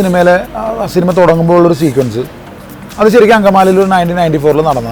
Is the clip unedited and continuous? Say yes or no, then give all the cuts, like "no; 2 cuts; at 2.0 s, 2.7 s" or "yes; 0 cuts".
yes; 0 cuts